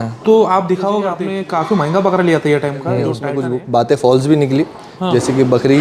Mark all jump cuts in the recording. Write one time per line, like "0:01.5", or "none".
0:01.3
0:03.2